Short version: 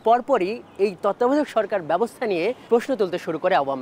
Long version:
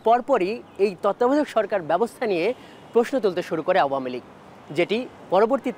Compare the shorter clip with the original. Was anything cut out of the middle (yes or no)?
yes